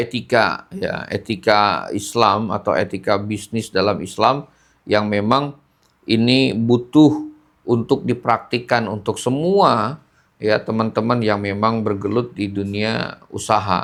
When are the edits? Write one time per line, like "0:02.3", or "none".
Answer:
none